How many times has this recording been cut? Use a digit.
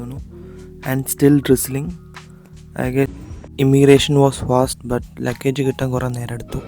1